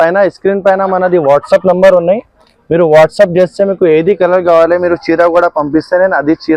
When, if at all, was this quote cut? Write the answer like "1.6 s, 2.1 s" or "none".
none